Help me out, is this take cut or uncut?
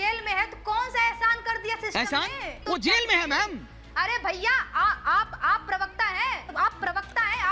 cut